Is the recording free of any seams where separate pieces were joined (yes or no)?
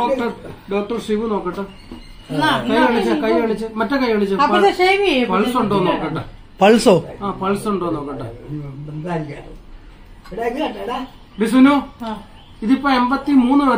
yes